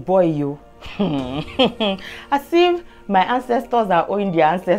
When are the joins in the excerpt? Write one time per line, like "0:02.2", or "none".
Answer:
none